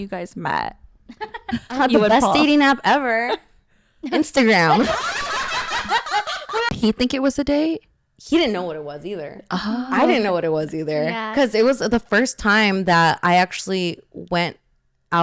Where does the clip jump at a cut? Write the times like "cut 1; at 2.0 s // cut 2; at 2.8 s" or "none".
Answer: cut 1; at 6.7 s